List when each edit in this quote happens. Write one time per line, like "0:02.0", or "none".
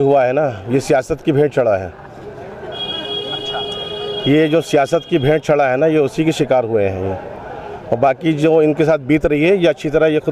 none